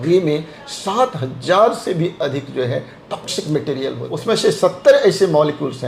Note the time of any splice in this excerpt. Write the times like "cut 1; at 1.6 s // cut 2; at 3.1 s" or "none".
cut 1; at 4.1 s